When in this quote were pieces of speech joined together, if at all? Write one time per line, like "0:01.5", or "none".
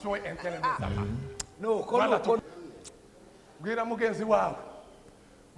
0:02.4